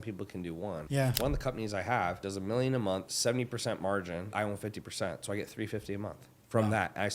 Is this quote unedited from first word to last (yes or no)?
no